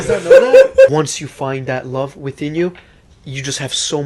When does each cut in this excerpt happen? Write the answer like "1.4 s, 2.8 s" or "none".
0.9 s